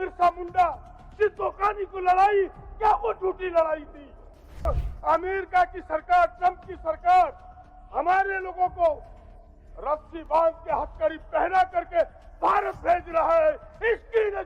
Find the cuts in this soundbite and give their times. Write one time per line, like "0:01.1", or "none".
0:04.4